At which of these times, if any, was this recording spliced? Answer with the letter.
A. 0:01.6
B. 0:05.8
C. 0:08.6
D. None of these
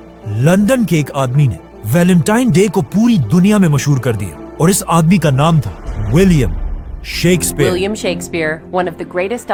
D